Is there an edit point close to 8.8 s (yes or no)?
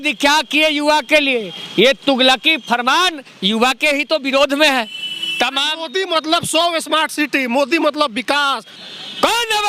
yes